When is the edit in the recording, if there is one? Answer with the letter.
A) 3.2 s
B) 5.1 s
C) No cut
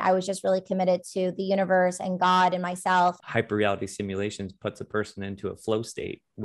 A